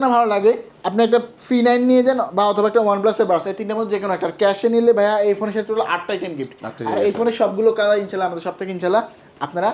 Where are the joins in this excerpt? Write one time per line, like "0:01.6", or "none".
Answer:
none

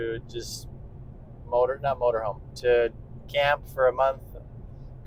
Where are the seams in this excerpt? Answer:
none

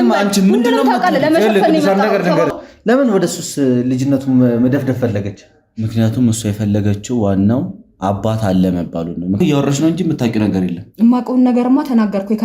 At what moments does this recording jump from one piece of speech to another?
0:02.5
0:09.4

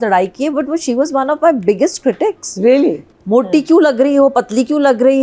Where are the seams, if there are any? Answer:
0:03.1

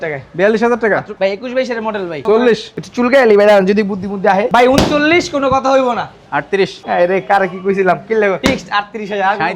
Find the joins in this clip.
0:01.1
0:02.2
0:04.5
0:06.8
0:08.4

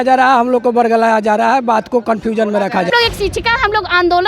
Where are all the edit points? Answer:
0:02.9

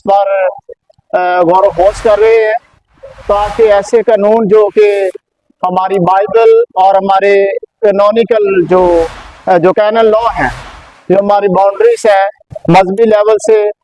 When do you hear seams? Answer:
none

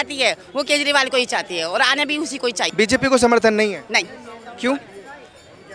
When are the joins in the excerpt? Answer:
0:02.6

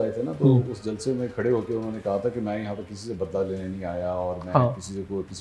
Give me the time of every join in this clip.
none

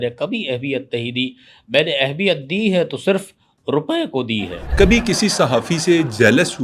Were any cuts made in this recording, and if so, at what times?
0:04.6

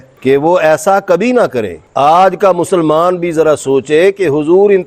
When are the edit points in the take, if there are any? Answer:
0:01.7

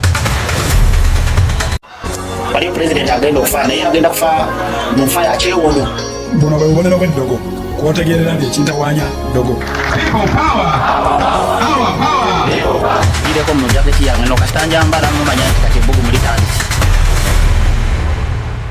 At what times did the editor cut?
none

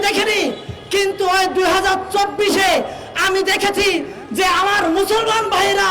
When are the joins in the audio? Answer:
none

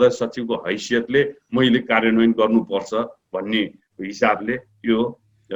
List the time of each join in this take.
none

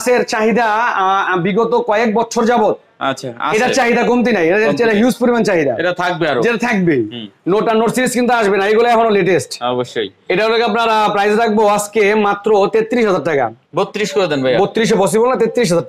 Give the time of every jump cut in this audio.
none

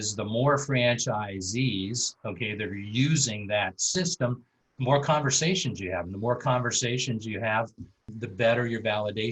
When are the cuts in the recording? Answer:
0:08.0

